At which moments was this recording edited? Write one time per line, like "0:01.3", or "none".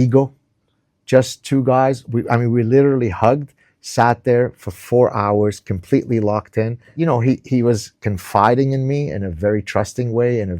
0:06.9